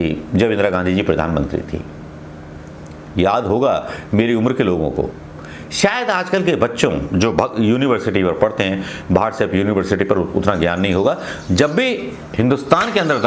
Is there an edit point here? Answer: no; 0 cuts

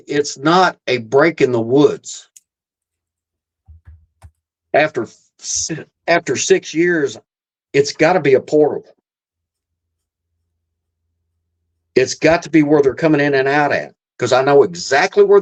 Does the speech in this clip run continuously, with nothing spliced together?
yes; 0 cuts

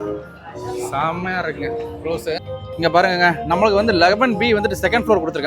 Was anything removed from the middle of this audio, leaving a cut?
yes; 1 cut; at 2.4 s

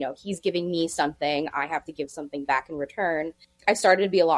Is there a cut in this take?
yes; 1 cut; at 3.4 s

